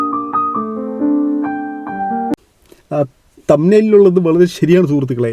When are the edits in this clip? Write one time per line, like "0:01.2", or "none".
none